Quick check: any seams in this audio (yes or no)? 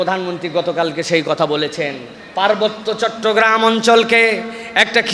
yes